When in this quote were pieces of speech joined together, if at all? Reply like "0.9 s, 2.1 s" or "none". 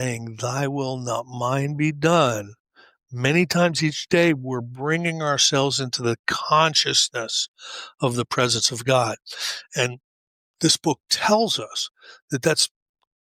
none